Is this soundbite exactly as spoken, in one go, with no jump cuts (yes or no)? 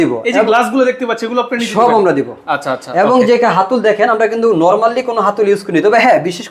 yes